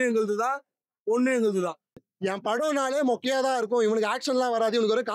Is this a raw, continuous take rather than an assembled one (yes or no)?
no